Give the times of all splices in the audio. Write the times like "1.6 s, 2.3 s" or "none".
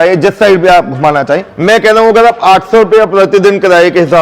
1.5 s